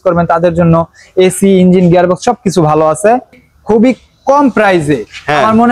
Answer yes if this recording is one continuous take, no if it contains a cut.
no